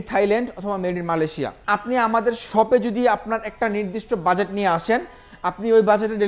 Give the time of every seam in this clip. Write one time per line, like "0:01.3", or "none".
0:01.5